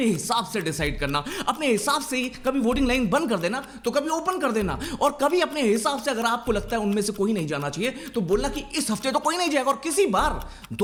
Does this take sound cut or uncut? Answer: uncut